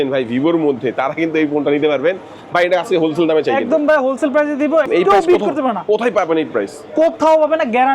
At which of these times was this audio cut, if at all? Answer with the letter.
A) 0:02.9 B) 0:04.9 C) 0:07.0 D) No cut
B